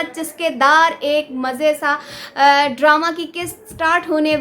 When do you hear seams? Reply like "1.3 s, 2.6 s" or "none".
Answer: none